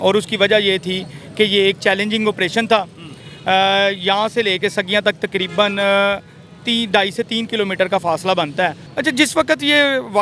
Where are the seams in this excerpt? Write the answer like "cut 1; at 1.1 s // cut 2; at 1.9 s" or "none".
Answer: cut 1; at 8.9 s